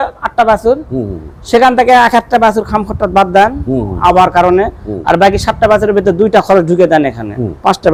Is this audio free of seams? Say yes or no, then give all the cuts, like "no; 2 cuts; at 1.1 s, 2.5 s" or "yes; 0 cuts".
yes; 0 cuts